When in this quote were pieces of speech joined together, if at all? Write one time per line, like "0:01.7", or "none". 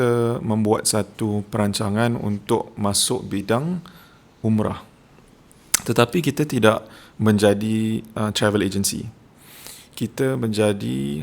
none